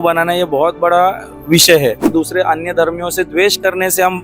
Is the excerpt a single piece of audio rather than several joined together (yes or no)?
no